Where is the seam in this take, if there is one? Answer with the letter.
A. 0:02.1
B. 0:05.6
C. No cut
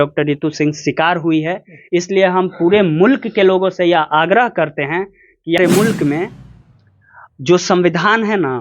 B